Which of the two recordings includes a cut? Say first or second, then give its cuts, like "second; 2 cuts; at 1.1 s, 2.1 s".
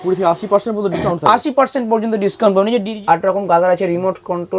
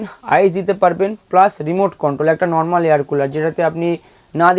first; 1 cut; at 2.9 s